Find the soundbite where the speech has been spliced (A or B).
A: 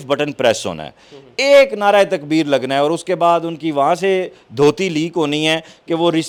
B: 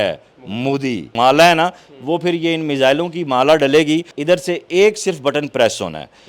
B